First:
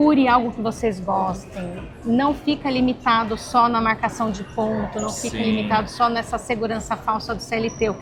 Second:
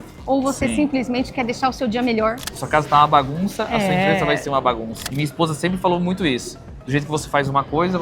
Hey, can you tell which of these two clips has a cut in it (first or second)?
second